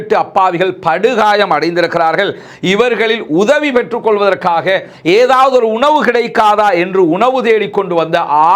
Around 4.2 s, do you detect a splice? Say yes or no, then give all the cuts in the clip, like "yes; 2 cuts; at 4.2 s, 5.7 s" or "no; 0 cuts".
no; 0 cuts